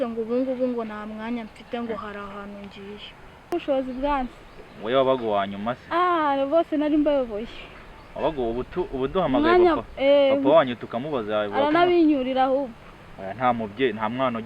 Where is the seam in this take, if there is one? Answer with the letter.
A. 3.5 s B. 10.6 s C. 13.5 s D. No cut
A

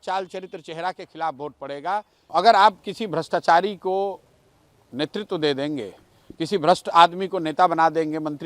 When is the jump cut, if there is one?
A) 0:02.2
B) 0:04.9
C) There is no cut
A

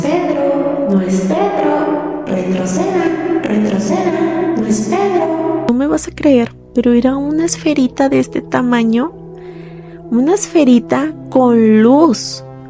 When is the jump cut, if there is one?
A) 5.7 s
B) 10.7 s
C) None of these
A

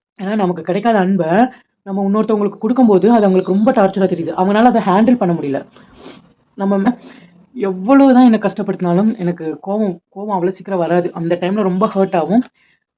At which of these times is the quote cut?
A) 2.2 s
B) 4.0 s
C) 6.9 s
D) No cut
C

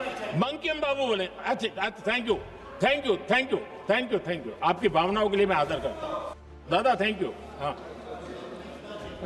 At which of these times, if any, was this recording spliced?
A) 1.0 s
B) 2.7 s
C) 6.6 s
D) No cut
C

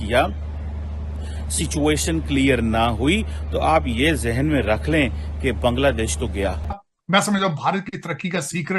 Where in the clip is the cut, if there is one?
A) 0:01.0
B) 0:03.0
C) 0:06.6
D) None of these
C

